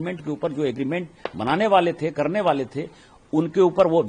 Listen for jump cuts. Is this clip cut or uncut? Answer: uncut